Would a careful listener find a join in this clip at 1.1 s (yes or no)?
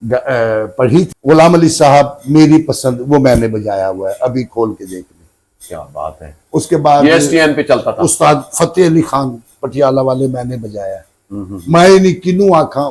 yes